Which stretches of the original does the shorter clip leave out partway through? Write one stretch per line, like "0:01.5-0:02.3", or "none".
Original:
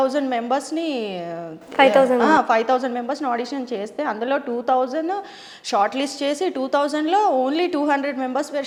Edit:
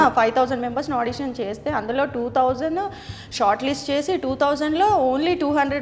none